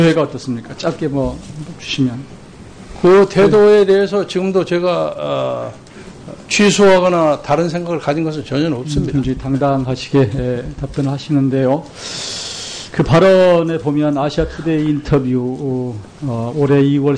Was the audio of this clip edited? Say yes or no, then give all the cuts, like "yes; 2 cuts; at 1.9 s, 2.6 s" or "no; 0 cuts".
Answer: yes; 1 cut; at 14.5 s